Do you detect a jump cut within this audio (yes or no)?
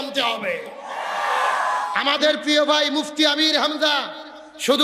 yes